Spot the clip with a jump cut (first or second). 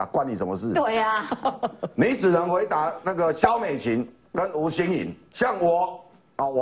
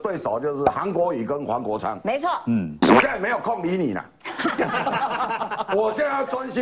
first